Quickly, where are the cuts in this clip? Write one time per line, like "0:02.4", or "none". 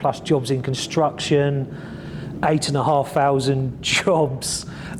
none

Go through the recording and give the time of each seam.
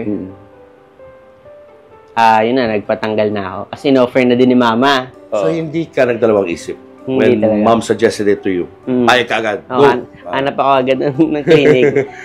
0:05.6

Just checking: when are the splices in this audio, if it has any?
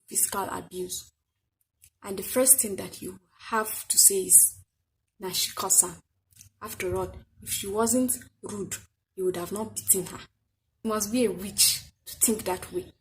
0:10.8

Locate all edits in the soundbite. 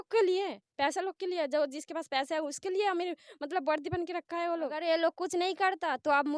0:04.8

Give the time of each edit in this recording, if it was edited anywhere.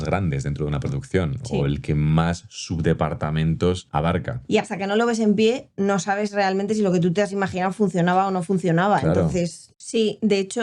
0:04.4
0:09.6

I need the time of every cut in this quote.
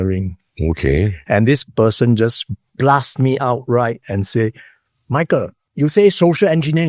0:05.6

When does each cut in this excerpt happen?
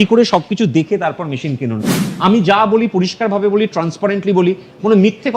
0:02.0

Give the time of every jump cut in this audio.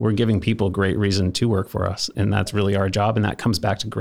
0:02.5

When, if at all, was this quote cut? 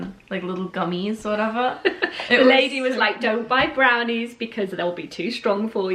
none

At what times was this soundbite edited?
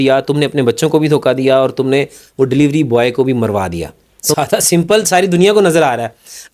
0:04.3

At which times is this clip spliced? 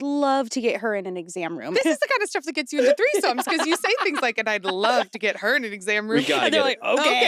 0:01.7

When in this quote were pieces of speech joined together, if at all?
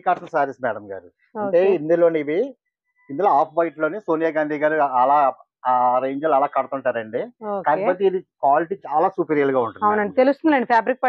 none

